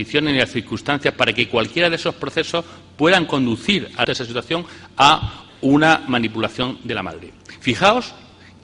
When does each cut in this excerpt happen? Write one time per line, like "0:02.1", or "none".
none